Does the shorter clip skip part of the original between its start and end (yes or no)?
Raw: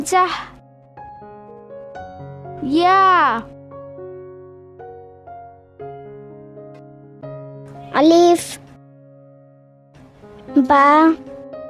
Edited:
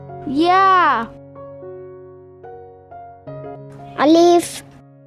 yes